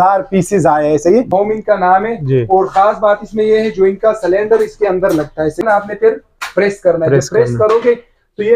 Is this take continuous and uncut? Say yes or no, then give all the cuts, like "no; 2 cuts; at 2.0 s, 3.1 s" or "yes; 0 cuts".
no; 2 cuts; at 1.3 s, 5.6 s